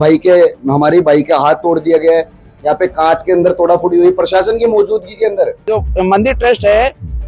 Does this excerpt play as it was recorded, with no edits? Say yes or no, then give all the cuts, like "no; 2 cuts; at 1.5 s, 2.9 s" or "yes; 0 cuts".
no; 1 cut; at 5.7 s